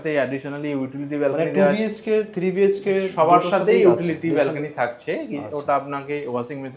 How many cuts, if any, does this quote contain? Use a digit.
0